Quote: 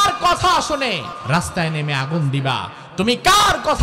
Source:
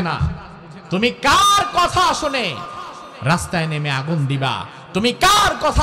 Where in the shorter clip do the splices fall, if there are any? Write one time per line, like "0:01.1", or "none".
0:01.1